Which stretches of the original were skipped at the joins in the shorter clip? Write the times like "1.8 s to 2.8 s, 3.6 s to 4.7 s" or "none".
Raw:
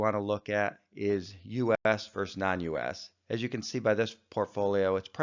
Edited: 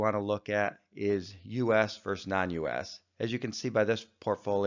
1.8 s to 1.8 s

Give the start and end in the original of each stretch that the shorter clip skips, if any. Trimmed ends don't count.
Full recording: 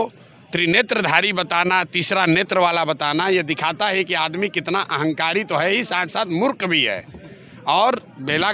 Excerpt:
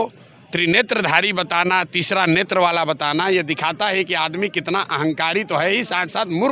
none

